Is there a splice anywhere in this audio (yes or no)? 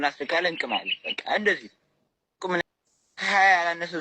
yes